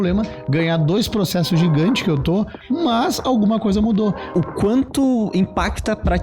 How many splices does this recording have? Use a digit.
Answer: 1